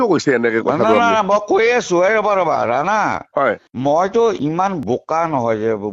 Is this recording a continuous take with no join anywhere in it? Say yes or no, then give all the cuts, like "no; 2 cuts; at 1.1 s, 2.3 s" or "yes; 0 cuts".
yes; 0 cuts